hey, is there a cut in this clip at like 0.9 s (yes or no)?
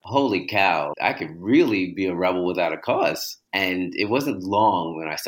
yes